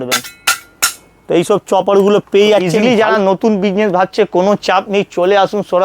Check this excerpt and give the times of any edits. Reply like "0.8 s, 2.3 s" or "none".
2.7 s